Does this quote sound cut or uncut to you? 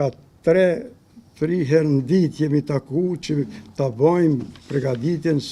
uncut